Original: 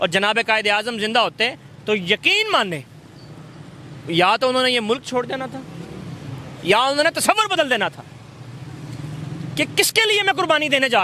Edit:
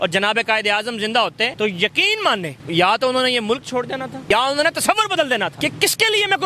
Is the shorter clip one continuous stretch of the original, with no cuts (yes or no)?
no